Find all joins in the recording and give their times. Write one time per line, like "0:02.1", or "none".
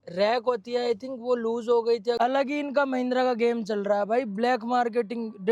0:02.2